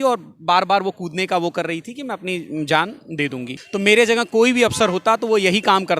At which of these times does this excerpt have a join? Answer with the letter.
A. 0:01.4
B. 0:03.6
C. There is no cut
B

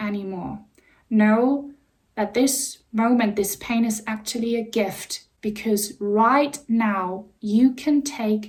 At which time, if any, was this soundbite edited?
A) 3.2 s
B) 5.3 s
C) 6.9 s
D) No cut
D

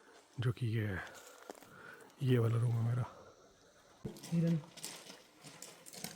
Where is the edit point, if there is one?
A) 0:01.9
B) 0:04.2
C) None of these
B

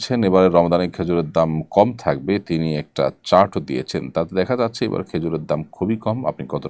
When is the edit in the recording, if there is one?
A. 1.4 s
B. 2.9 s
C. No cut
C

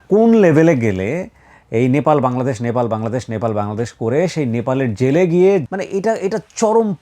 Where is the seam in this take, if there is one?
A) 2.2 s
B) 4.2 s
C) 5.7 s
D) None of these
C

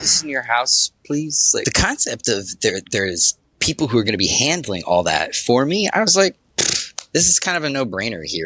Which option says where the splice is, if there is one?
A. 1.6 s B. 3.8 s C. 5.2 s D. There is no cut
A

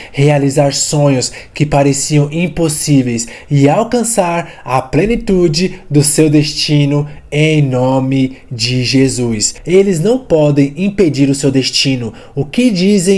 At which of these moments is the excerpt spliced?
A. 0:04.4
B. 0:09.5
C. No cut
B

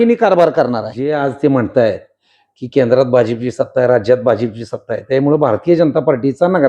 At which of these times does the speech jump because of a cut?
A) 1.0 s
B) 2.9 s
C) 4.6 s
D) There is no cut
A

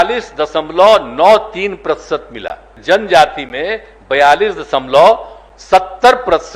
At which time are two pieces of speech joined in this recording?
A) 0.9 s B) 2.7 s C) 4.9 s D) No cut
B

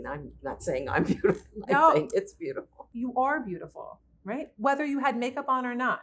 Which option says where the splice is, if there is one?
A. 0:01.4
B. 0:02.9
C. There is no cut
B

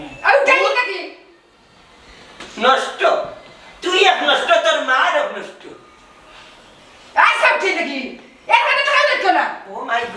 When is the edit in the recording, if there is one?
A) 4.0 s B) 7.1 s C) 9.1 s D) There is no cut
D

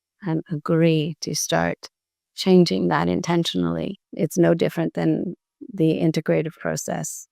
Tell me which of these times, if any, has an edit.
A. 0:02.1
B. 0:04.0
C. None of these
B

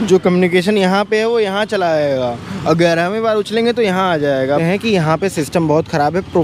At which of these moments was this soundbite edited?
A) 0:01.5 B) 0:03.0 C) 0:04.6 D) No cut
C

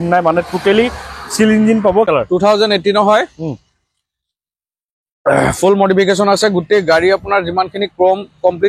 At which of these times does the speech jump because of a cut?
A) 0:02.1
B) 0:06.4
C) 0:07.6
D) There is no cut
A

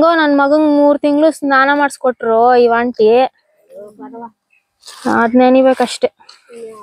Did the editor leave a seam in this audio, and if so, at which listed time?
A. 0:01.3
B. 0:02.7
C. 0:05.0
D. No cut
D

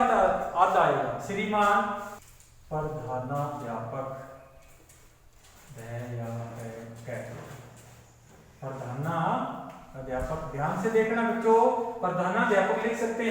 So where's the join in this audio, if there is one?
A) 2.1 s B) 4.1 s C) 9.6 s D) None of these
A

